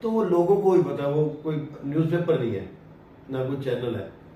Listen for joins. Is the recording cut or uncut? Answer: uncut